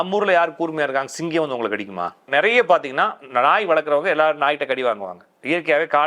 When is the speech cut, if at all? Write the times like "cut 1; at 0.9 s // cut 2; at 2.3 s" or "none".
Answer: cut 1; at 2.3 s